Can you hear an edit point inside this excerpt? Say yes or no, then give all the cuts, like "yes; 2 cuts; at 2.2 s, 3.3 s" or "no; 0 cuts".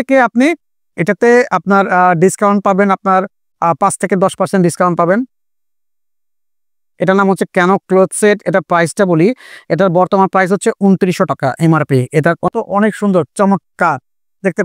yes; 2 cuts; at 6.9 s, 12.5 s